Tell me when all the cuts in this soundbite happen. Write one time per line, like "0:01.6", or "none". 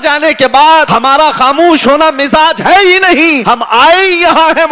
0:00.9
0:03.4